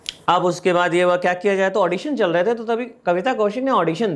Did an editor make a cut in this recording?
no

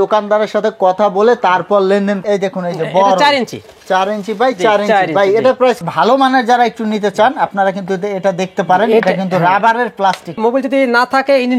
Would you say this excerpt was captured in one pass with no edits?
no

